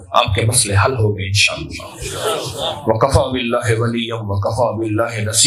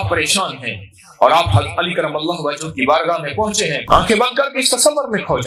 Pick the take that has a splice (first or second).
second